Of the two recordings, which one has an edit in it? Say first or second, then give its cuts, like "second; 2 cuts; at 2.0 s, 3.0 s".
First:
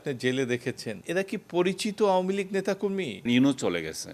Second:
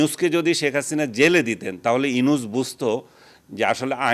first; 2 cuts; at 1.0 s, 3.2 s